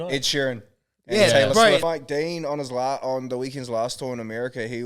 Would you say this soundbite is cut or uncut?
cut